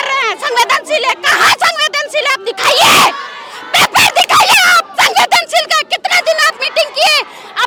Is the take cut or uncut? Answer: uncut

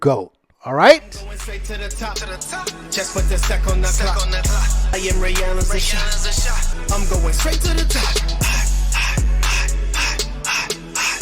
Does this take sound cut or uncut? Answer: cut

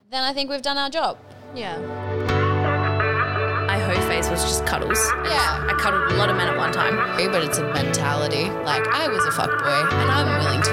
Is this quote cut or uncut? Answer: cut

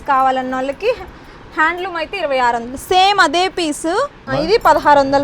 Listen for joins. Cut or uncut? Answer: cut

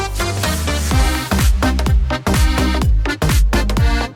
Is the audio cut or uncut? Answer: uncut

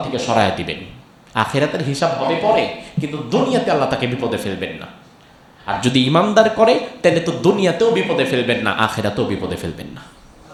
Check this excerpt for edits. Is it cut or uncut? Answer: uncut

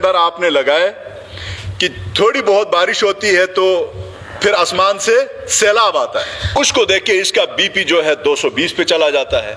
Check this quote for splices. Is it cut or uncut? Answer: cut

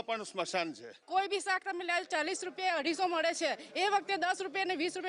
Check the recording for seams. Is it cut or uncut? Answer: cut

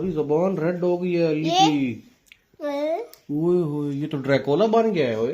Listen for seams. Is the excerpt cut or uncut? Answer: uncut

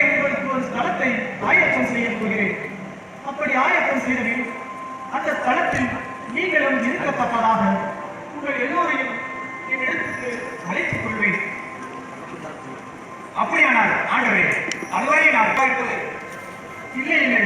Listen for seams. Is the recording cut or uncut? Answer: cut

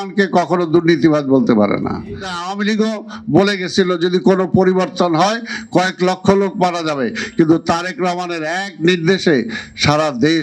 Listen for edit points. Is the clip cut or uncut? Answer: cut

